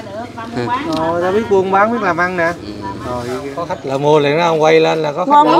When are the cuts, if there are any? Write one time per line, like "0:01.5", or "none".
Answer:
0:03.6

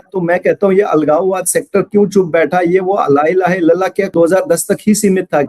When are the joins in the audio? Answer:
0:04.1

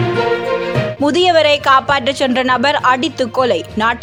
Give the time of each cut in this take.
none

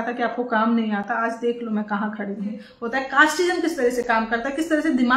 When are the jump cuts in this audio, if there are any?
0:02.7

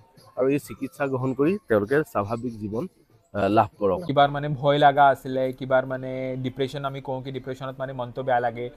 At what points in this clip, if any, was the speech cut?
0:04.1

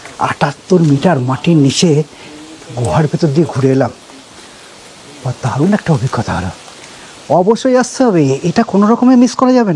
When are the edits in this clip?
none

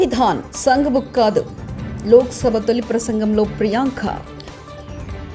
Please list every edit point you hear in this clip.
none

